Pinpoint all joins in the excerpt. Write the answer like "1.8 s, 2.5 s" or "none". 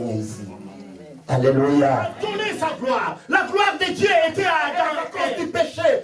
2.3 s, 5.0 s

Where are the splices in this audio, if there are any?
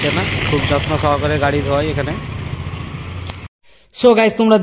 3.5 s

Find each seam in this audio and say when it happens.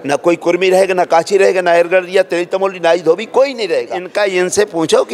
4.0 s

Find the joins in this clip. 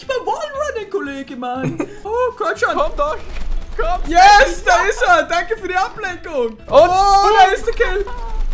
2.0 s, 6.6 s

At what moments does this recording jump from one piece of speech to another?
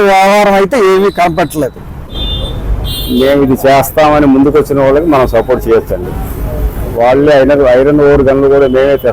2.2 s

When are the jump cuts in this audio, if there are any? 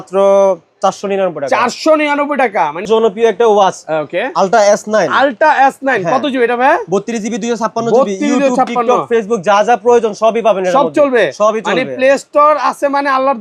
2.9 s

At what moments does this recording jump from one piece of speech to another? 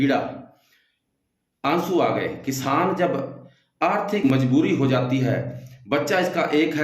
4.2 s

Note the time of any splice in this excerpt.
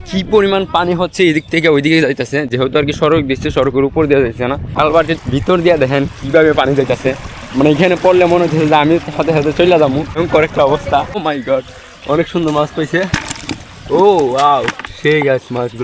4.7 s, 10.2 s, 11.2 s

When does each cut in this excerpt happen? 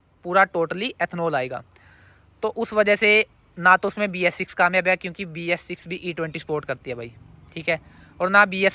none

